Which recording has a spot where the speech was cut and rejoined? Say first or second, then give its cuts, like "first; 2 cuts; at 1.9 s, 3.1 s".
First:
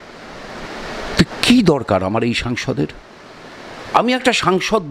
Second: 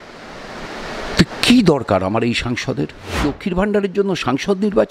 second; 1 cut; at 3.2 s